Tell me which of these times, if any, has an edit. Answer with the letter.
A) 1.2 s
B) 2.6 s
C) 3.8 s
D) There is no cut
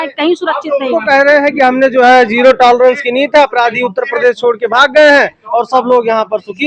D